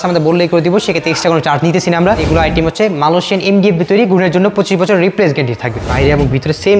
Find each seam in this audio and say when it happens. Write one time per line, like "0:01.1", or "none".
0:02.2
0:05.8